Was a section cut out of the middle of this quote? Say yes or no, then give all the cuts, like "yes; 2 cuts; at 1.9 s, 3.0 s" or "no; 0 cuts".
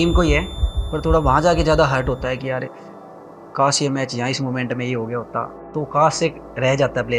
yes; 1 cut; at 5.7 s